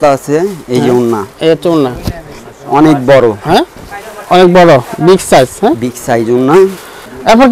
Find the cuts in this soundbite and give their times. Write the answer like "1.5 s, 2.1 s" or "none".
none